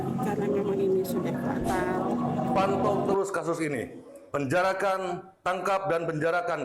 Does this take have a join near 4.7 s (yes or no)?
no